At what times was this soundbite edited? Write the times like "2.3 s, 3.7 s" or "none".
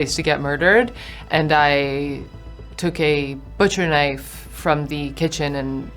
none